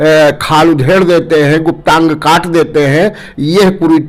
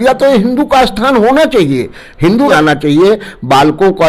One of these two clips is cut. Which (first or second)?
second